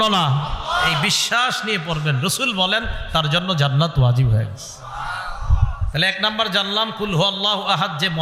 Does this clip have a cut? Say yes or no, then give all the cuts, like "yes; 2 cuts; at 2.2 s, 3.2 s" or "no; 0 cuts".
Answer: no; 0 cuts